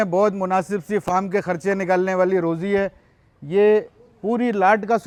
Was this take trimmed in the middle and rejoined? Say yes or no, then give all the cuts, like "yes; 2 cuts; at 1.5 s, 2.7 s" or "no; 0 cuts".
no; 0 cuts